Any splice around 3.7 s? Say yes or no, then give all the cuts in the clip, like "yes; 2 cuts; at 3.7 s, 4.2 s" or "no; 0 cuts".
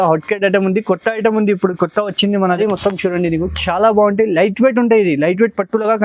no; 1 cut; at 2.4 s